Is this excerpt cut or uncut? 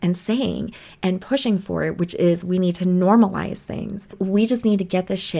cut